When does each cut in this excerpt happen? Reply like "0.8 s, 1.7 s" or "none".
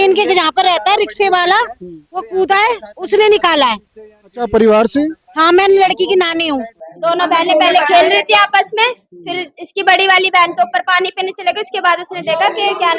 6.8 s